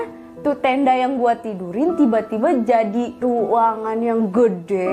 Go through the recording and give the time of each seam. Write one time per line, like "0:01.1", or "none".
0:03.2